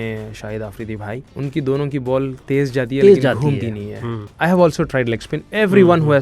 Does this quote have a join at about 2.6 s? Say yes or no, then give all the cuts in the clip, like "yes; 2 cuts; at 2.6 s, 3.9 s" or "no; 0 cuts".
no; 2 cuts; at 1.2 s, 4.2 s